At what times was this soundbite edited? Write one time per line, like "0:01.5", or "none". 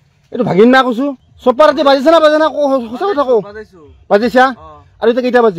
0:01.2